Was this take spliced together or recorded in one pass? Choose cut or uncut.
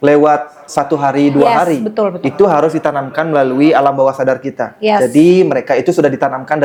uncut